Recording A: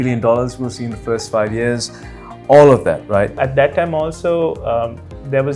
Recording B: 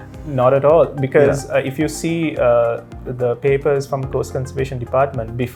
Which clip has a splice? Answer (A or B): A